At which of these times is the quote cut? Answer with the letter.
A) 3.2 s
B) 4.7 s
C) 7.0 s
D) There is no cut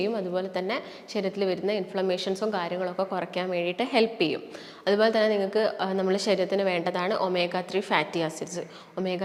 D